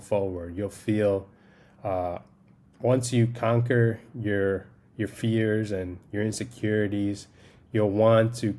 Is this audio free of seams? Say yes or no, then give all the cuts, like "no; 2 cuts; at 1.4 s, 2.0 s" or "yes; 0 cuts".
yes; 0 cuts